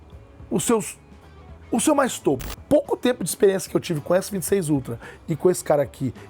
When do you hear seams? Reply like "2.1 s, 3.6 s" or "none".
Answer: 2.5 s